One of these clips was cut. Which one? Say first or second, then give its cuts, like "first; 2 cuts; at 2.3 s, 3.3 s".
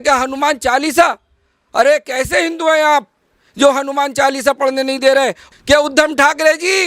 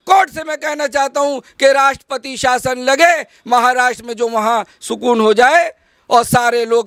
first; 1 cut; at 5.4 s